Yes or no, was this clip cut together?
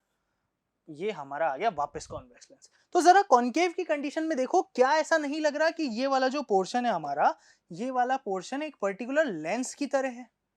no